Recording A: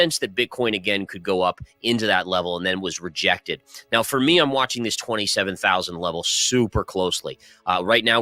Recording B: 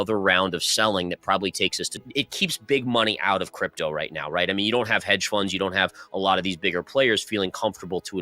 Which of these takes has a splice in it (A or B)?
B